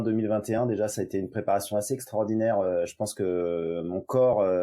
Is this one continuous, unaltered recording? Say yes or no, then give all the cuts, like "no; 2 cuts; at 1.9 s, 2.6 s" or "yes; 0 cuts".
yes; 0 cuts